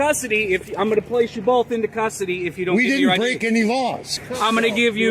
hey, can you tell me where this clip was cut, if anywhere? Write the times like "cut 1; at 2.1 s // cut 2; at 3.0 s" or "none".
cut 1; at 4.1 s